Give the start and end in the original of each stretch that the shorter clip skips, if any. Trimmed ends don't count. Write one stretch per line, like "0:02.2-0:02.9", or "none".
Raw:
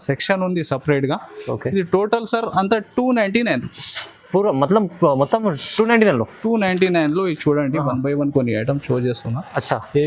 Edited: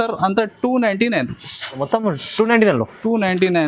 0:04.2-0:05.2